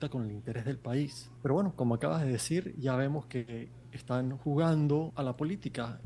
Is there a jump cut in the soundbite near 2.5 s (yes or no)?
no